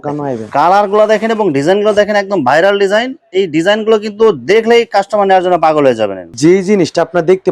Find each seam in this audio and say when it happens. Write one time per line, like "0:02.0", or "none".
none